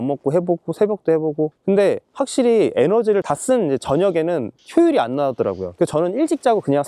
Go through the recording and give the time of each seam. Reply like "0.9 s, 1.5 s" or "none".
1.6 s, 3.2 s, 5.7 s